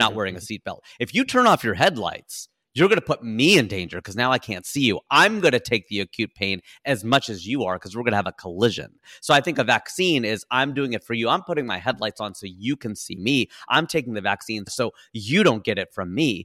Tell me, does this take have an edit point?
yes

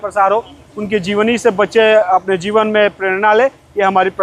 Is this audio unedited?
yes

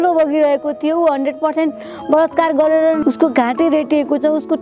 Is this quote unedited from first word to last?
no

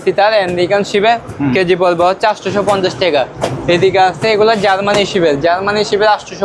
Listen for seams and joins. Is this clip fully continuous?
yes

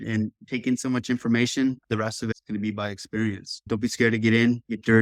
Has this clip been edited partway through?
no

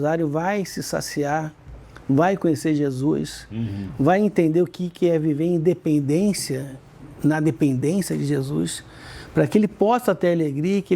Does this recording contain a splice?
no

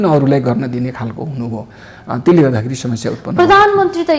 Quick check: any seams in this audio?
no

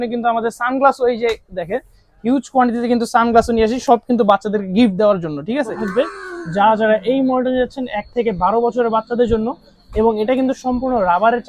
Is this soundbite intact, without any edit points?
no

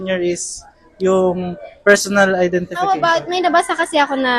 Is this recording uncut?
no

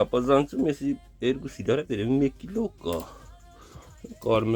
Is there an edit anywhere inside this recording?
no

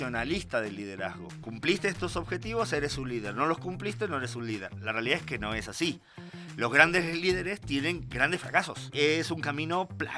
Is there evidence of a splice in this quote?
yes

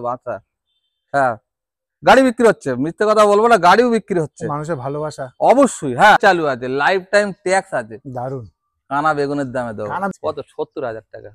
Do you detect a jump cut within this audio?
yes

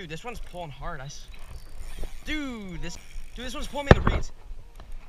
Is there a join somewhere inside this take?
yes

